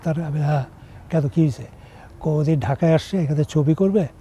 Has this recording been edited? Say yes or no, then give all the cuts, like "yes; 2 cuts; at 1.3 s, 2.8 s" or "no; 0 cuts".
no; 0 cuts